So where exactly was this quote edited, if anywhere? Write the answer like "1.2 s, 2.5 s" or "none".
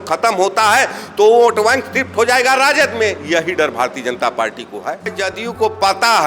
5.1 s